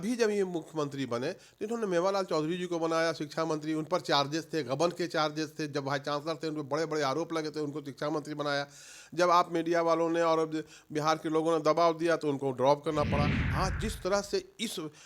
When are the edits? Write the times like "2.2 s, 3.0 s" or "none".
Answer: 13.4 s